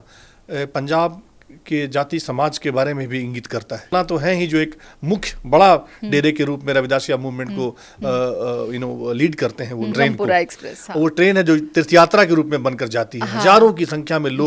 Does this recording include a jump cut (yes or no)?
yes